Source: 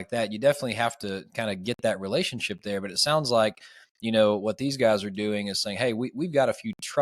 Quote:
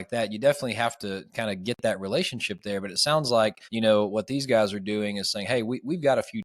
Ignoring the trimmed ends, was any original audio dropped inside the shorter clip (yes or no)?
yes